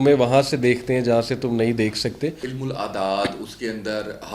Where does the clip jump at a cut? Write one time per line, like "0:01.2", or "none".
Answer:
0:02.4